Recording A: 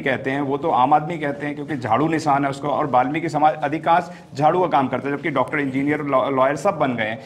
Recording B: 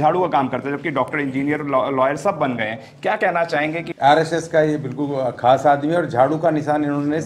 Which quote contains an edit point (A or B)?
B